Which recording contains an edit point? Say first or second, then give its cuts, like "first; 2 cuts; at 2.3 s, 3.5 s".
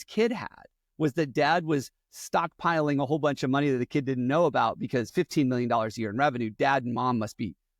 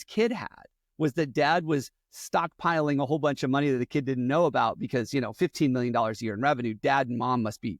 first; 1 cut; at 5.1 s